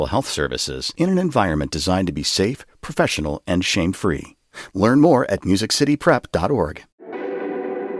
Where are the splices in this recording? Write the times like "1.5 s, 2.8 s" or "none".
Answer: 7.0 s